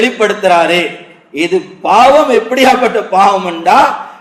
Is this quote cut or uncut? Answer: uncut